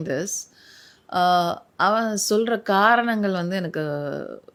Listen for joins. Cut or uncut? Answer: uncut